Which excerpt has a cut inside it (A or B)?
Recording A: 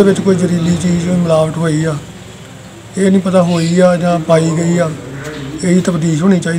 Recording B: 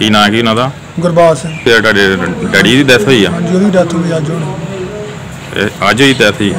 B